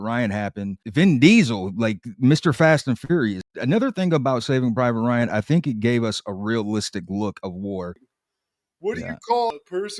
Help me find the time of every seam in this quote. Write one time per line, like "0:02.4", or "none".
0:08.0